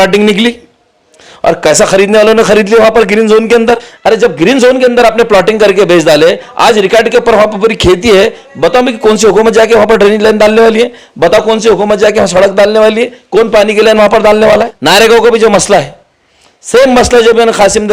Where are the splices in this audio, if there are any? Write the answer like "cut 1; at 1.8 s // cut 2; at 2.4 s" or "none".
cut 1; at 3.9 s // cut 2; at 14.7 s